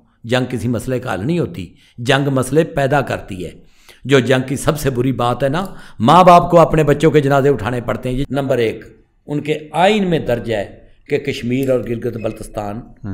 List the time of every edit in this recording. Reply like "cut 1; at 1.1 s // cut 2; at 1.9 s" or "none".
cut 1; at 8.2 s

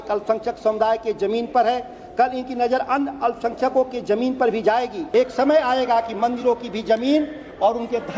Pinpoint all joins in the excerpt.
cut 1; at 5.0 s

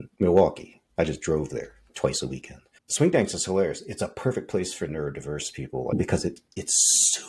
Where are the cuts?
cut 1; at 5.9 s

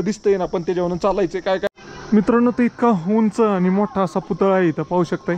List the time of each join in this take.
cut 1; at 1.7 s

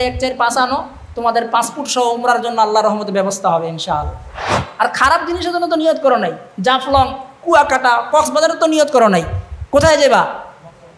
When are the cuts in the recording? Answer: cut 1; at 4.6 s

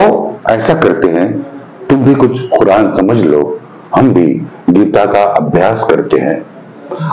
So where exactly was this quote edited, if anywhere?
none

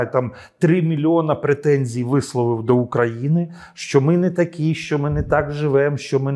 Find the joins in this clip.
none

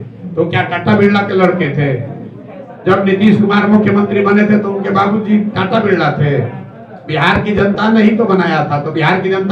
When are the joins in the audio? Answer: none

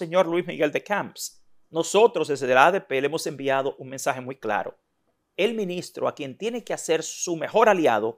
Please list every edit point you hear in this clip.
none

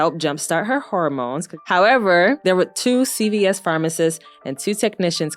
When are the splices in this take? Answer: cut 1; at 1.6 s // cut 2; at 2.4 s

